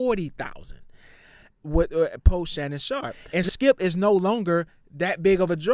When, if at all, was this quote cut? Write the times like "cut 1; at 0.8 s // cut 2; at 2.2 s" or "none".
cut 1; at 3.2 s